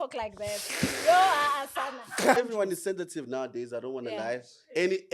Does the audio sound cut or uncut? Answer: cut